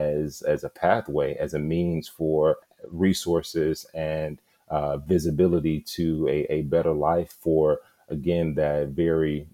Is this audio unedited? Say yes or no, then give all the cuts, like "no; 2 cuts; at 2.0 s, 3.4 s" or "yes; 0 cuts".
no; 1 cut; at 2.7 s